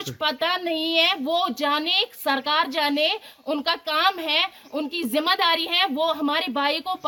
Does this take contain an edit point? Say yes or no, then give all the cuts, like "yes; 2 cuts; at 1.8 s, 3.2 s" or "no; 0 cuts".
no; 0 cuts